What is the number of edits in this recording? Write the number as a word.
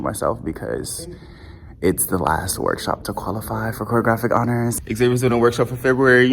one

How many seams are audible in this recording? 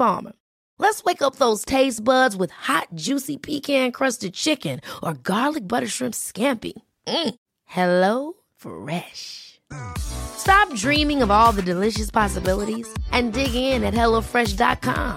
zero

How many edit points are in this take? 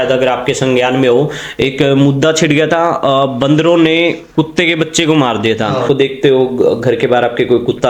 one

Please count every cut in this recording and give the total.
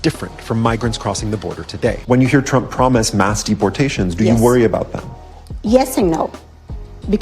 one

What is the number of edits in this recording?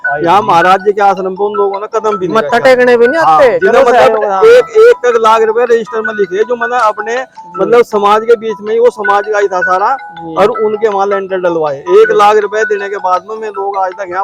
zero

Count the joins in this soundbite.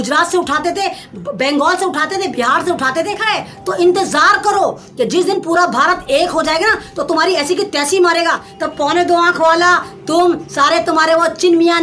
two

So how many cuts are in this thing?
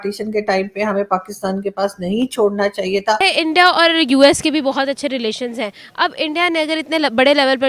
one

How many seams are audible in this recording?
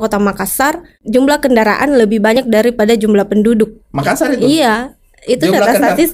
one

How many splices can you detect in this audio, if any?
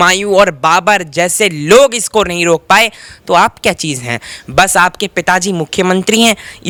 zero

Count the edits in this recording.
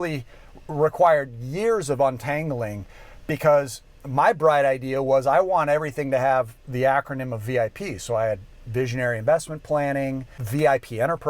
one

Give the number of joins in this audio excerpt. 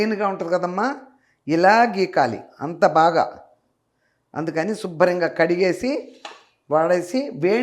zero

